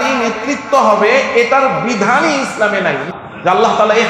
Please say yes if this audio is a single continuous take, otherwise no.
no